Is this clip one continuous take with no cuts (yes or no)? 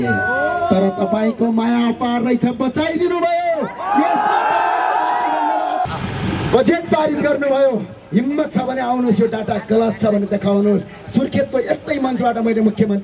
no